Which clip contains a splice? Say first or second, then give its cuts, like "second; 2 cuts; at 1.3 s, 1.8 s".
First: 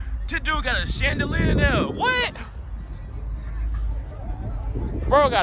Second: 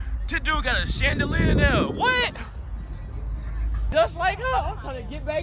second; 1 cut; at 3.9 s